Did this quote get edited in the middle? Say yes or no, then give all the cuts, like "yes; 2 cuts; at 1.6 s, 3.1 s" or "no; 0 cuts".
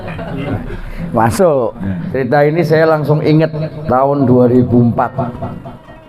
yes; 1 cut; at 1.9 s